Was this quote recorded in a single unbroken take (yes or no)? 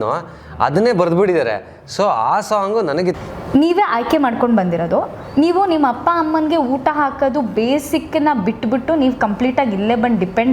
no